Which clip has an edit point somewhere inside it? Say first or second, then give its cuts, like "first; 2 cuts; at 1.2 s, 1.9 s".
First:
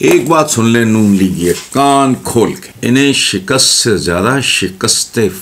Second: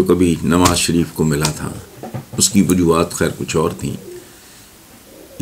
first; 2 cuts; at 1.6 s, 2.7 s